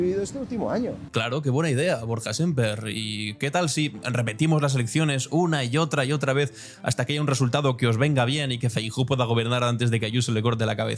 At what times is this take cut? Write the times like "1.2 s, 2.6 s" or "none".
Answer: none